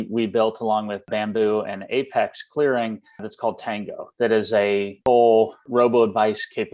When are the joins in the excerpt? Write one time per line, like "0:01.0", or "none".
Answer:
0:01.1
0:03.3
0:04.9
0:05.6